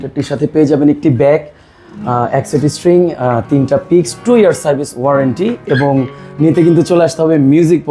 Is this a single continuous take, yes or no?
yes